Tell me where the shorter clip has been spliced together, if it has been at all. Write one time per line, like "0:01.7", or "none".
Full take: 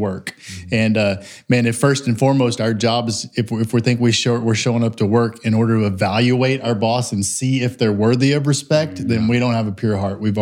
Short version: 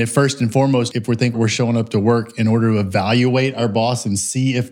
0:01.1